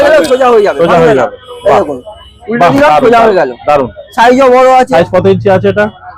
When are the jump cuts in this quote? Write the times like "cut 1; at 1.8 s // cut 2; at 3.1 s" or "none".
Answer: none